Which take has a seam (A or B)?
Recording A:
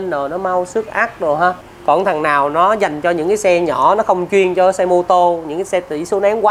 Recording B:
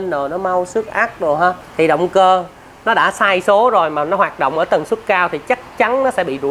B